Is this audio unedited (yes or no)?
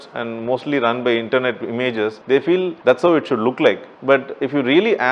no